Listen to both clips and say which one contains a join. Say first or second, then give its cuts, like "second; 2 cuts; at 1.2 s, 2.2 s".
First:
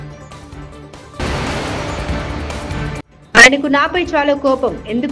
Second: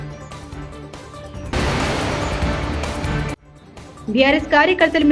first; 2 cuts; at 1.2 s, 3.1 s